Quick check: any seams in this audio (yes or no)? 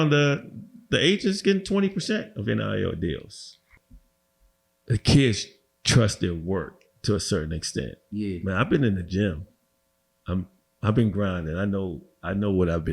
yes